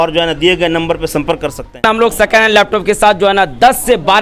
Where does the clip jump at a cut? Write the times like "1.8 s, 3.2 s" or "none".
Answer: 1.8 s